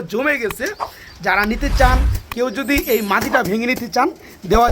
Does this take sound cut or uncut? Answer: uncut